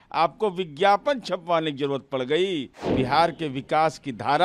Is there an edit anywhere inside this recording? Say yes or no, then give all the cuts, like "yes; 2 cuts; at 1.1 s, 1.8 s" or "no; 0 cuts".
yes; 1 cut; at 2.8 s